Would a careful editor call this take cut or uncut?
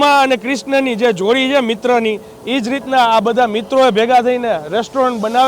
uncut